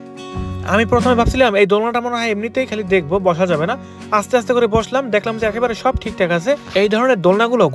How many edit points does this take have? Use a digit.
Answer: 0